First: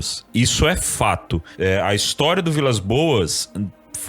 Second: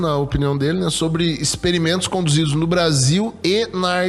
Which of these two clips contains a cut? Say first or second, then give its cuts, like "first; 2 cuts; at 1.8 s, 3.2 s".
first; 1 cut; at 1.5 s